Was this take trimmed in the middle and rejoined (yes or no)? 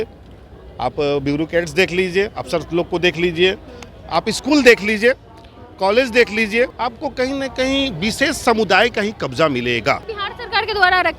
yes